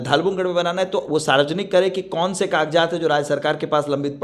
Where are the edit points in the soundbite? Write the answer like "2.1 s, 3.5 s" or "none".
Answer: none